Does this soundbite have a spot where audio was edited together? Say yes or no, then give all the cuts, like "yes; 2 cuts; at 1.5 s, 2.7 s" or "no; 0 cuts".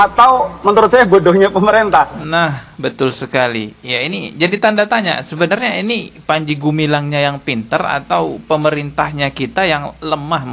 no; 0 cuts